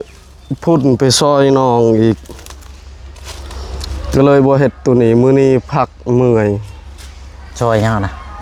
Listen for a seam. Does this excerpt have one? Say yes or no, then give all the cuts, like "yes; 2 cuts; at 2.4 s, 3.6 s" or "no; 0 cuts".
no; 0 cuts